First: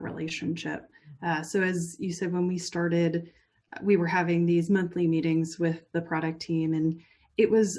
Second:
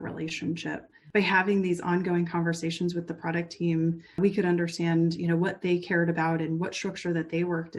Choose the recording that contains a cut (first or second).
second